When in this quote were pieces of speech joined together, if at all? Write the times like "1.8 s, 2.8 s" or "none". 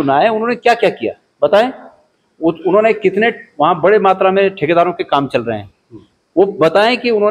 none